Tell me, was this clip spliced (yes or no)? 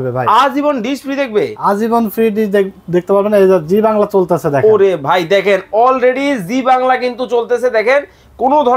no